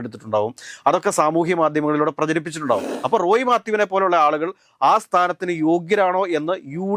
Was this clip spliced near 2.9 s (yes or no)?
yes